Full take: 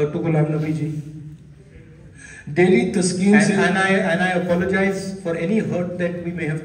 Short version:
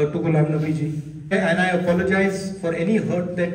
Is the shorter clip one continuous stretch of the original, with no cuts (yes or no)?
no